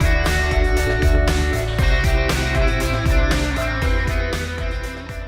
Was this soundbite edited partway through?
no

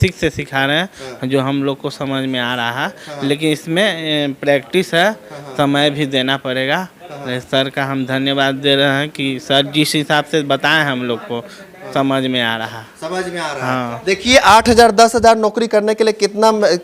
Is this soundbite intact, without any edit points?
yes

